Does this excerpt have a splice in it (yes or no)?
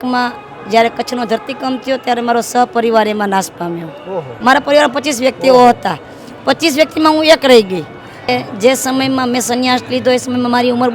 yes